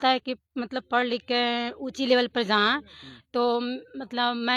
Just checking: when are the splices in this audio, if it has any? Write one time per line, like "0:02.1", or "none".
none